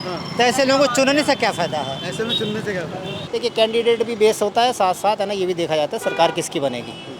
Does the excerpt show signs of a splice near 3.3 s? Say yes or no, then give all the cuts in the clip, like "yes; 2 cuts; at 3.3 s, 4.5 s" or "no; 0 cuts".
yes; 1 cut; at 3.3 s